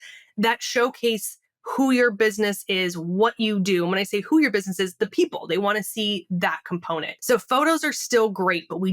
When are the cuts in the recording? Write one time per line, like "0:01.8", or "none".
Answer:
0:07.1